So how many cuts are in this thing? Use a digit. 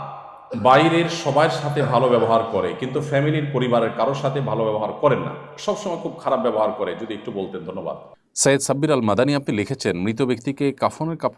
1